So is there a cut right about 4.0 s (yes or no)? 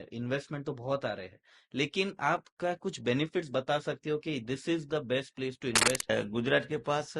no